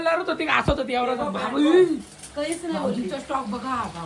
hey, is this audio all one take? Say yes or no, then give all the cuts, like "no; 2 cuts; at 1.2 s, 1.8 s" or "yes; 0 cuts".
yes; 0 cuts